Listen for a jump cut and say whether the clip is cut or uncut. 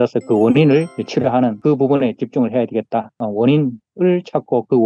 cut